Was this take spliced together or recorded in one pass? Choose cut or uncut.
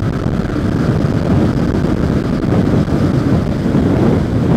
uncut